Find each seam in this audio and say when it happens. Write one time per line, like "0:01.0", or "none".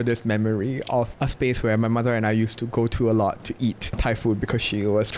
none